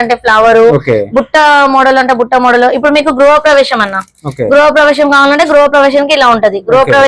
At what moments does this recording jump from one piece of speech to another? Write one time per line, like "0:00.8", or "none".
none